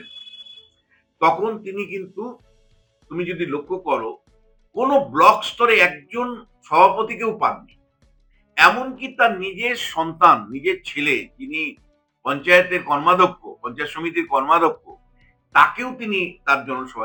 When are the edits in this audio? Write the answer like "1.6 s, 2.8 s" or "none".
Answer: none